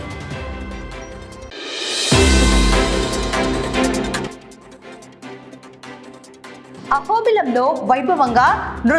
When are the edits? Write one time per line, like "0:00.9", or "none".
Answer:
0:01.5
0:04.3
0:06.7